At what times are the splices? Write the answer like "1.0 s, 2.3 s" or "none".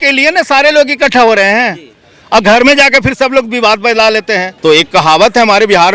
4.5 s